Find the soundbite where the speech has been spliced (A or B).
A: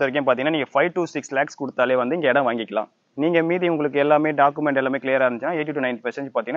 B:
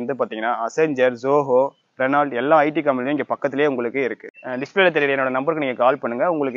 B